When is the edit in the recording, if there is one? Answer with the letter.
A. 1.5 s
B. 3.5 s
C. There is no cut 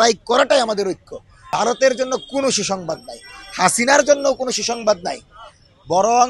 A